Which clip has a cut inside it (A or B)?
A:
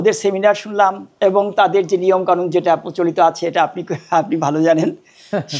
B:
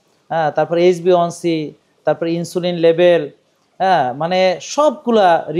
A